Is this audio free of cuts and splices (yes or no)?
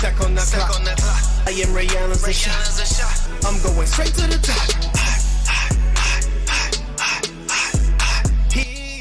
yes